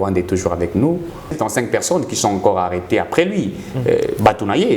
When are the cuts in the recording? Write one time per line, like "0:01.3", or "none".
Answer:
0:01.4